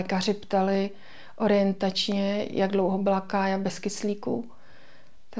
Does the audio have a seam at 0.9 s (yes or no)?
no